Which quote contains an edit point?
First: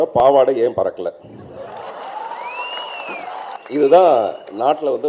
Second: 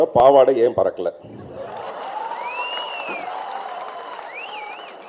first; 1 cut; at 3.6 s

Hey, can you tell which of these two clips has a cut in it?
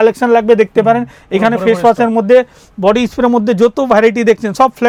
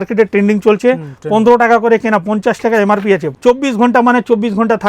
second; 1 cut; at 3.3 s

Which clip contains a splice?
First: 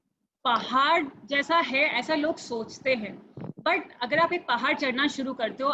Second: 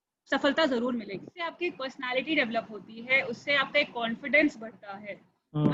second; 1 cut; at 1.4 s

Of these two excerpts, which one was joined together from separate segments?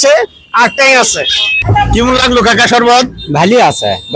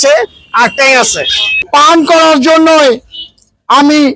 second; 1 cut; at 1.6 s

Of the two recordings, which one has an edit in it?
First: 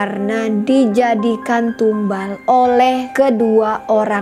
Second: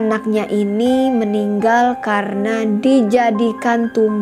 first; 1 cut; at 3.0 s

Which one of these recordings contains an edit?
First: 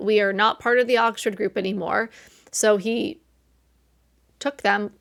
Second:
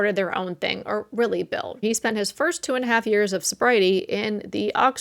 second; 1 cut; at 1.8 s

